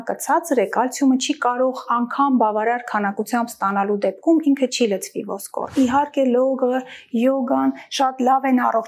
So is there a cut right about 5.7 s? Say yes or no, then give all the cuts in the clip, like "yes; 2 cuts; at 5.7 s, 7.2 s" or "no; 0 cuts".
yes; 1 cut; at 5.7 s